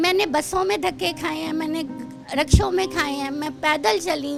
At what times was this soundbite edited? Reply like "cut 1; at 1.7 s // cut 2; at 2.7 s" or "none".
none